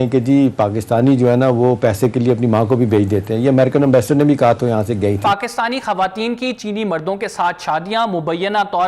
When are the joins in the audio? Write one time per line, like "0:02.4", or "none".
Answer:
0:05.2